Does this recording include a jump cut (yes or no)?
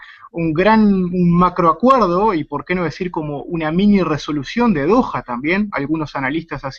no